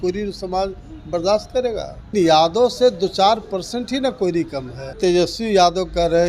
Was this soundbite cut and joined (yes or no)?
yes